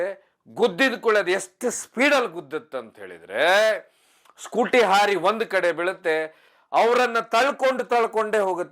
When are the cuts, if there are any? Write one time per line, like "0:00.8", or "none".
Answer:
0:06.5